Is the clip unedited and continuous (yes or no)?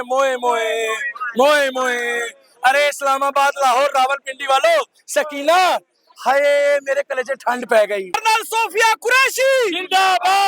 no